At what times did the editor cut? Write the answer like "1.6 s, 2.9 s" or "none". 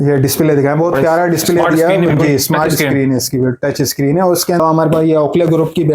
4.6 s